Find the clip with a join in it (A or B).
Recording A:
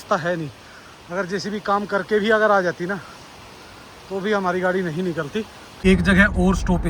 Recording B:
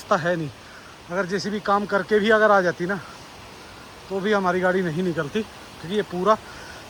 A